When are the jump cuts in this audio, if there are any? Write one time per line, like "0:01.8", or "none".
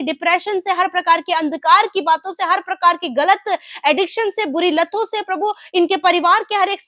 none